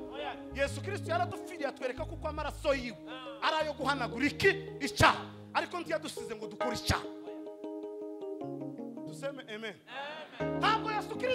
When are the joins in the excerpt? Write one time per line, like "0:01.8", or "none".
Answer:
none